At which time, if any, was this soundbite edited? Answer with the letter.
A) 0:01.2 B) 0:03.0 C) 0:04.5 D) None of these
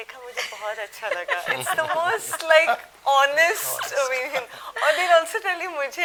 D